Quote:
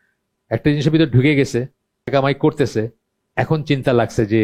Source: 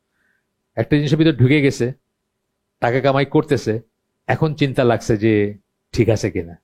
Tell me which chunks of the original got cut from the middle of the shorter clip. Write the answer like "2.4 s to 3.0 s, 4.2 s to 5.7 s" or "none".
2.4 s to 3.0 s